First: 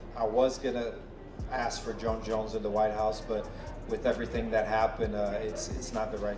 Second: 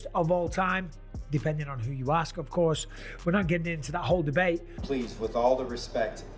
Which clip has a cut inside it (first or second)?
second